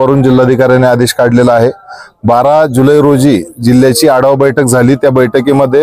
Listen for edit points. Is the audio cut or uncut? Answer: uncut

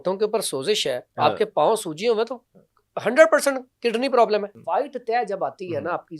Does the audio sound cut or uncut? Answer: cut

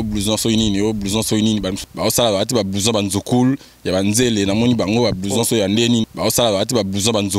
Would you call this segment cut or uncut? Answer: cut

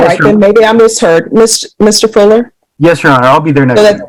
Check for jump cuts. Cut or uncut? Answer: uncut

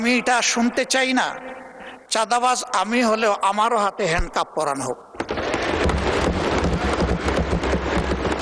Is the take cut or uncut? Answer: uncut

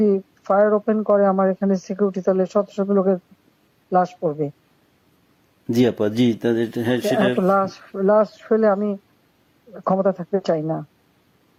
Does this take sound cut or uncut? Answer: uncut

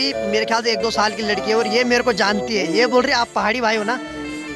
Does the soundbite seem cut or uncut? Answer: uncut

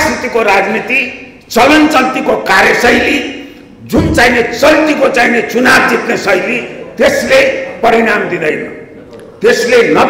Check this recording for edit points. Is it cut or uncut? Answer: uncut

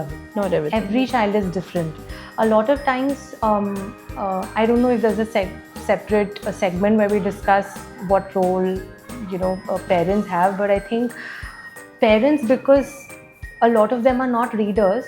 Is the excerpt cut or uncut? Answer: uncut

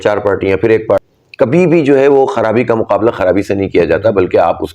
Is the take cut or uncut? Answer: cut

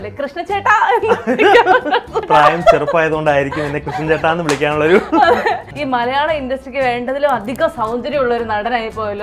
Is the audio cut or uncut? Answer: cut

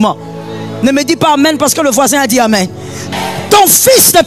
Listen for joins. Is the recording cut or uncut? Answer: cut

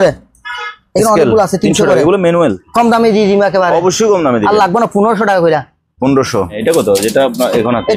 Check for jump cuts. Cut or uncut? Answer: cut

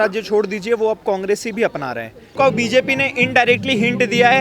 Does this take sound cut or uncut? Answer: cut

